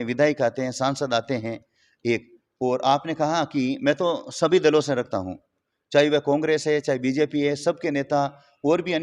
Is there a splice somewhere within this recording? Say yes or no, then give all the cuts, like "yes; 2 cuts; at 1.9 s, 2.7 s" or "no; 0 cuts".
no; 0 cuts